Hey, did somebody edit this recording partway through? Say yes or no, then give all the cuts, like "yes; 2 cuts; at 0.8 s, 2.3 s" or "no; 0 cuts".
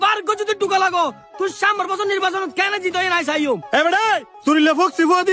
yes; 1 cut; at 3.6 s